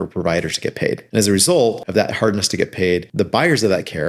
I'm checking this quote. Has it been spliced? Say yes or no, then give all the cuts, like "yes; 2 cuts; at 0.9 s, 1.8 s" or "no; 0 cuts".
yes; 3 cuts; at 1.0 s, 1.8 s, 3.1 s